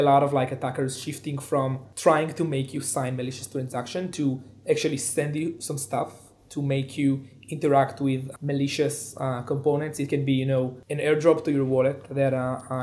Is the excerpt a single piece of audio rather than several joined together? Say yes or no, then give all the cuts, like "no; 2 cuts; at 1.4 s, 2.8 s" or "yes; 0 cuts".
yes; 0 cuts